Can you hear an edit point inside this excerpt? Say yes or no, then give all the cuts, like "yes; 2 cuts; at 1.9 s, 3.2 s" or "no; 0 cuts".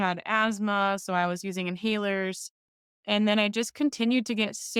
yes; 1 cut; at 2.9 s